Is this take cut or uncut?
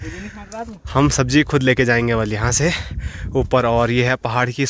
uncut